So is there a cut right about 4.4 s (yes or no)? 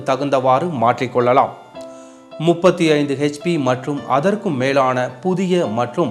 yes